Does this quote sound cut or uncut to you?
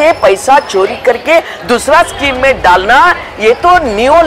uncut